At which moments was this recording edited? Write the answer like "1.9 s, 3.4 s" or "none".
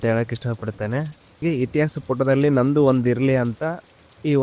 1.4 s

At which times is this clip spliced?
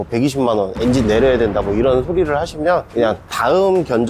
none

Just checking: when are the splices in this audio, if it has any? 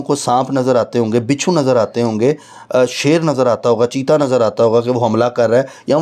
none

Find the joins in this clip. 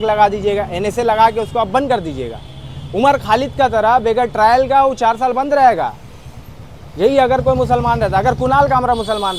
none

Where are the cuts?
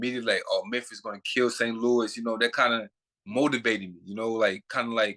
none

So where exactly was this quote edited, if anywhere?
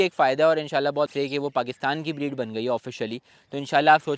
1.1 s

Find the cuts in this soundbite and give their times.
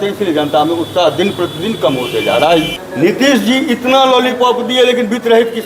2.7 s

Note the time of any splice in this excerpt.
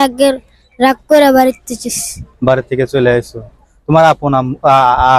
none

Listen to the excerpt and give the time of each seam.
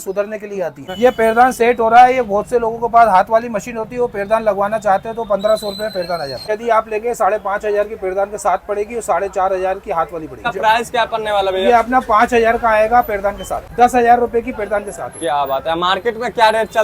0.8 s, 6.5 s, 10.5 s, 13.7 s

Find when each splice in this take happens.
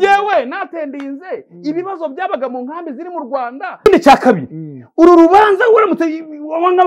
3.9 s

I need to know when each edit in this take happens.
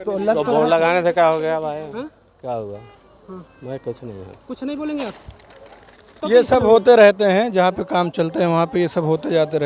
6.2 s

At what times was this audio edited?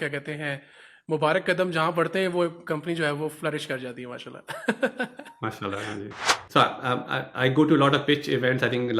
6.3 s

